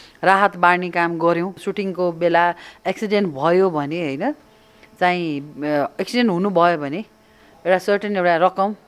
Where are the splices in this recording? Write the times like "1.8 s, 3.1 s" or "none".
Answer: 1.6 s